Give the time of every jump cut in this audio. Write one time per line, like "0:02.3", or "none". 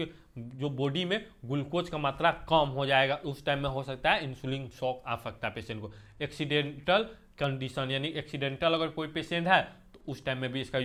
none

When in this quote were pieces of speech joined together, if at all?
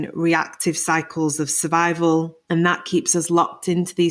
0:02.4

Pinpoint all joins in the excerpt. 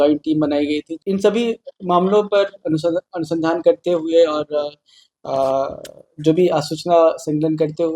0:00.9

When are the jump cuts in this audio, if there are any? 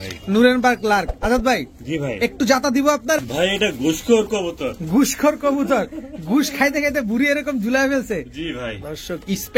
0:03.2

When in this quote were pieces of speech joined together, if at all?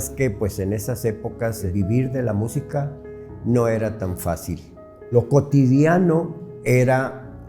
0:01.6
0:05.1

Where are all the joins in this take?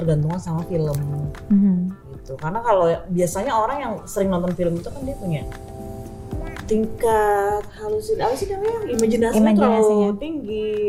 none

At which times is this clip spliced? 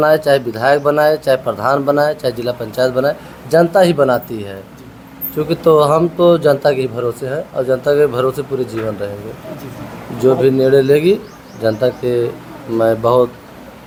none

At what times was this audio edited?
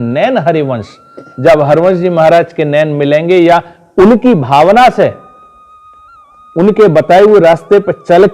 none

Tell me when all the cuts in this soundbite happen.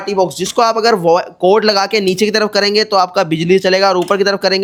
none

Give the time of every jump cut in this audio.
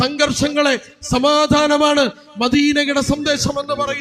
none

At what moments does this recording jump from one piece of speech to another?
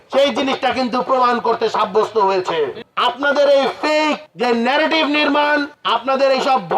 0:02.8
0:04.3
0:05.7

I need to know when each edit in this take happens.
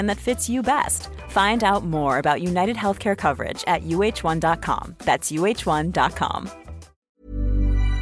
0:07.1

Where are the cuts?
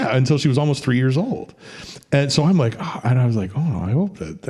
none

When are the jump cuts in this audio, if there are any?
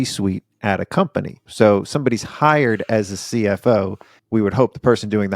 0:01.4

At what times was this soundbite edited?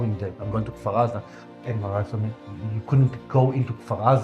0:02.5

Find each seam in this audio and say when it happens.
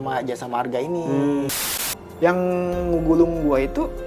0:01.6

